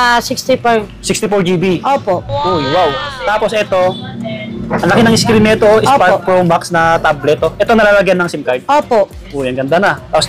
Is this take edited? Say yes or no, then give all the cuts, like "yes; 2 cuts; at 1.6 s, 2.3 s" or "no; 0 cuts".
no; 0 cuts